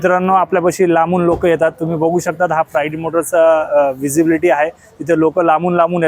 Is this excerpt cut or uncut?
uncut